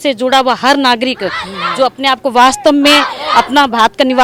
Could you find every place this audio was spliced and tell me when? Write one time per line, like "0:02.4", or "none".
none